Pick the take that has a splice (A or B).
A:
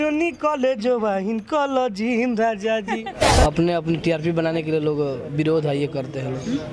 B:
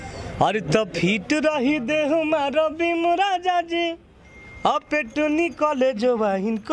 A